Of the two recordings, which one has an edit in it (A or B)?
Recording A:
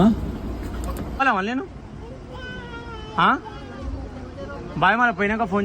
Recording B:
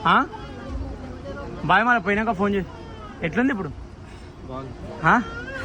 A